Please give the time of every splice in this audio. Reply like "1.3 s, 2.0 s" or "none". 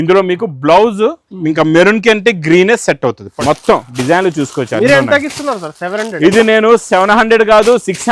3.2 s